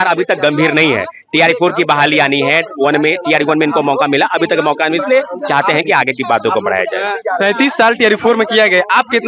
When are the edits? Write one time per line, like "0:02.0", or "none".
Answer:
none